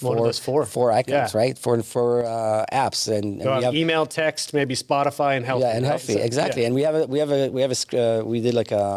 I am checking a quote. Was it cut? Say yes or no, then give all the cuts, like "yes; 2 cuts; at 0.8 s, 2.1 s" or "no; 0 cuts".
no; 0 cuts